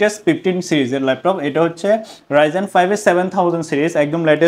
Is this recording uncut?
yes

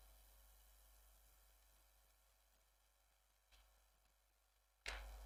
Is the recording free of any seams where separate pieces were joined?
yes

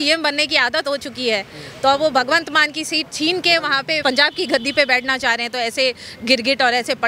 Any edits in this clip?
yes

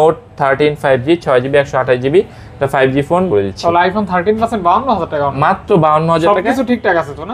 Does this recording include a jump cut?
yes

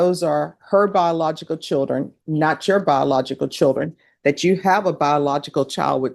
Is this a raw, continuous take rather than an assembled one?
yes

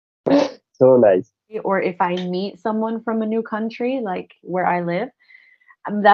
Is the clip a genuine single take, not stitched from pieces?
no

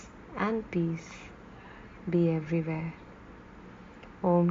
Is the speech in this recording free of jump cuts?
no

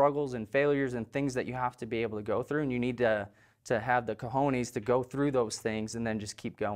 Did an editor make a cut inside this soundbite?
no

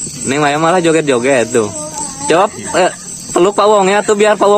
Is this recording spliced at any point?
no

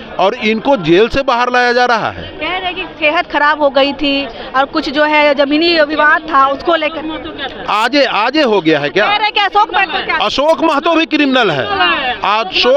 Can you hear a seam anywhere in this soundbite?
no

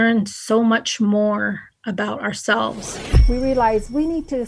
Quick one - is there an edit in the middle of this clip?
yes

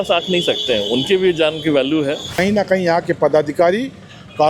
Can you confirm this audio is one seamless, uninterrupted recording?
no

